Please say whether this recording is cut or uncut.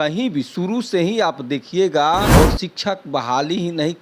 cut